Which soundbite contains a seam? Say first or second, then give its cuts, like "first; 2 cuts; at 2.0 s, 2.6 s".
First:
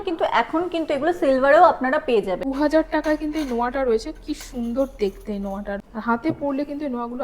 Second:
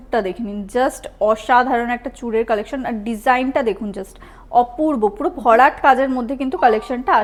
first; 2 cuts; at 2.5 s, 5.9 s